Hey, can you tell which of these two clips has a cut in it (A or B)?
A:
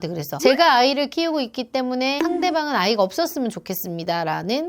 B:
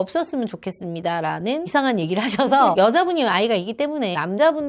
B